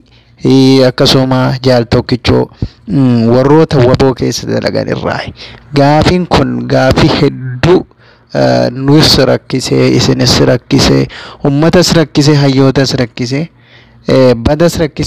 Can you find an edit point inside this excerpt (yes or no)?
yes